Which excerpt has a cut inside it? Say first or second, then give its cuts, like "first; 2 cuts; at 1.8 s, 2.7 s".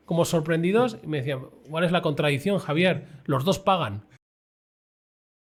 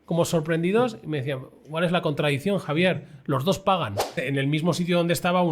second; 1 cut; at 4.2 s